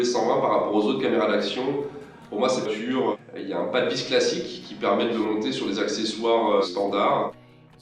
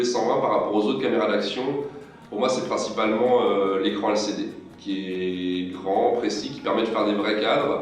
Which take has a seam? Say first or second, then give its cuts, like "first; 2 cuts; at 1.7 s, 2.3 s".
second; 1 cut; at 2.7 s